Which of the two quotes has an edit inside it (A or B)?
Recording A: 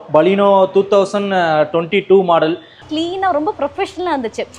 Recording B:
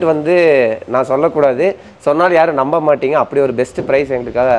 A